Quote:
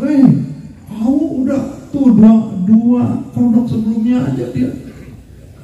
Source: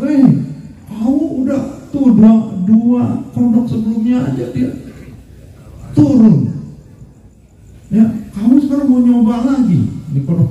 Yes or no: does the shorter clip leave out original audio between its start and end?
no